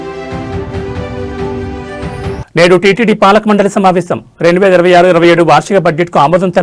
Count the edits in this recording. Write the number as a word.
one